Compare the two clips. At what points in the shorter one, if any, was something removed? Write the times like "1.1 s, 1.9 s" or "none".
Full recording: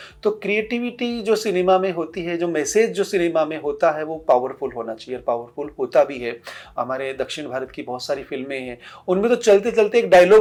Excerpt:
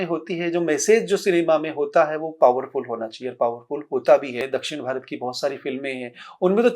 4.4 s